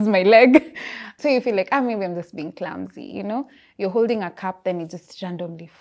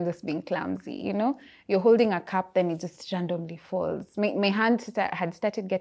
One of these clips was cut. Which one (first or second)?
first